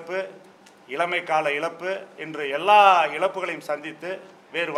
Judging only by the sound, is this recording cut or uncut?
uncut